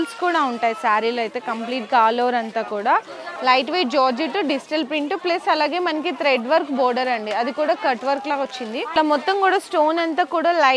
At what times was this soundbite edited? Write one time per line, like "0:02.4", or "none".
0:03.1
0:08.9